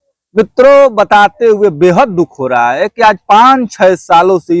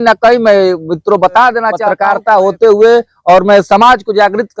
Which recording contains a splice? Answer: second; 1 cut; at 1.9 s

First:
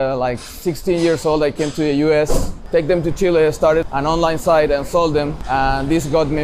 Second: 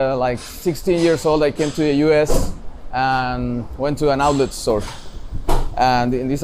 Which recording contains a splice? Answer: first; 3 cuts; at 2.5 s, 3.8 s, 5.4 s

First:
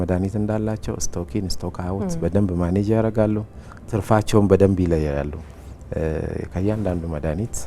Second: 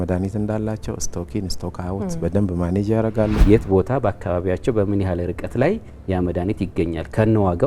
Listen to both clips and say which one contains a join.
second; 1 cut; at 3.4 s

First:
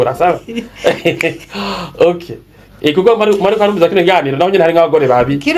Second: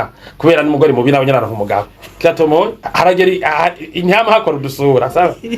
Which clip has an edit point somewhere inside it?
second; 1 cut; at 2.8 s

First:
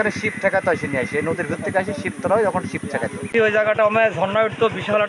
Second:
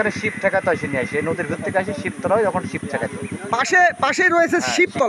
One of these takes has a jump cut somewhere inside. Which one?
first; 1 cut; at 3.1 s

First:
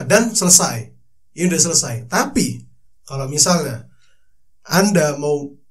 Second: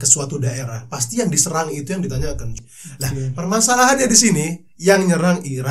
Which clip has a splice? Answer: second; 1 cut; at 2.6 s

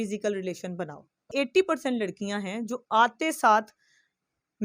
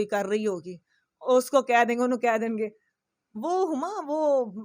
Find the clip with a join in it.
first; 1 cut; at 1.2 s

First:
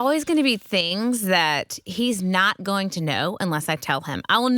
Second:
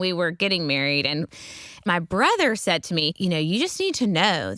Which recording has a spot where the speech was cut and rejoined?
second; 2 cuts; at 1.3 s, 3.1 s

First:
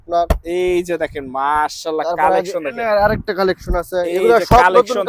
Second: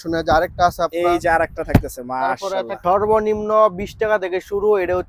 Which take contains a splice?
second; 1 cut; at 2.8 s

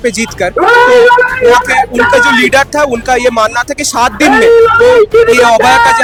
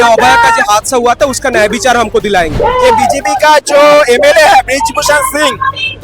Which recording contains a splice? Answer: second; 1 cut; at 2.5 s

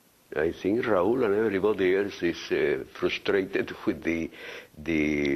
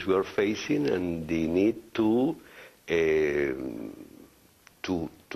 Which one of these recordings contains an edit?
second; 1 cut; at 1.7 s

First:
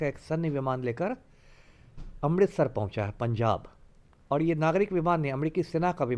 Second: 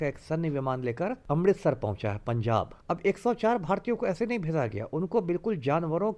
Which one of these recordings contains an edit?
second; 2 cuts; at 1.2 s, 2.8 s

